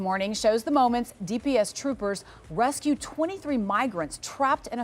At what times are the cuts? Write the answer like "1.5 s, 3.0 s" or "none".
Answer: none